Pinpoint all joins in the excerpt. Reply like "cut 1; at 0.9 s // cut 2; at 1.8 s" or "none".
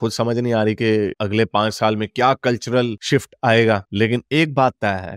none